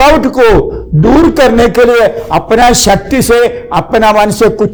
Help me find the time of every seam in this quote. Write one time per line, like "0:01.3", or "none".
none